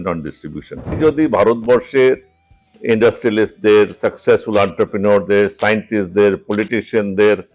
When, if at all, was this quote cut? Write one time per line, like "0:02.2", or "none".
0:01.0